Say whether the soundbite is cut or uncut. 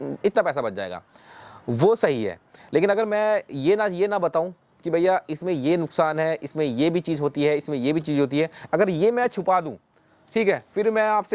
uncut